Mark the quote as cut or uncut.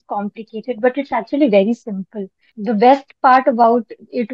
cut